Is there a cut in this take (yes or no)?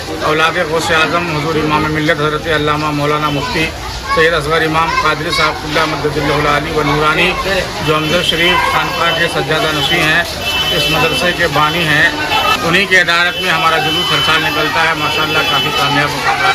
no